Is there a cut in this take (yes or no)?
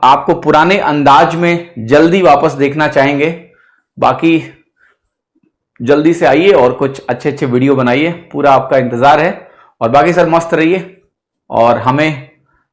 no